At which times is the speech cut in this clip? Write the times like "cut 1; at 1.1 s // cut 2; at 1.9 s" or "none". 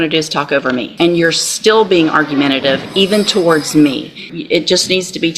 cut 1; at 0.9 s // cut 2; at 4.3 s